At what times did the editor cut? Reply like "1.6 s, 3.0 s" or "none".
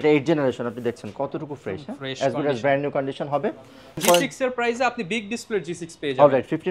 4.0 s